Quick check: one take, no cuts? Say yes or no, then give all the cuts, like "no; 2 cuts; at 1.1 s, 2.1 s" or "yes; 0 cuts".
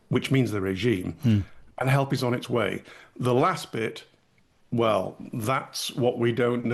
yes; 0 cuts